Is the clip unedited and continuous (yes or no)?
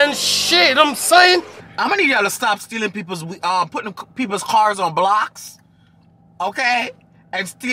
no